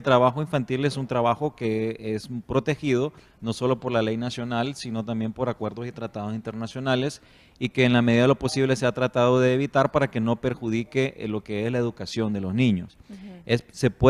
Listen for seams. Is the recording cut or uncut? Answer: cut